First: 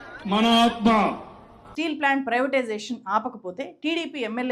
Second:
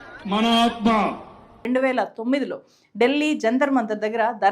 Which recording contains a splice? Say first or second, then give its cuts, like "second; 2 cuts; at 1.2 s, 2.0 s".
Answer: second; 1 cut; at 1.6 s